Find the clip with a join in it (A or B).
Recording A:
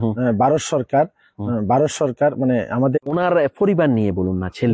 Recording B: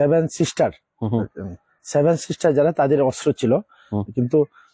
A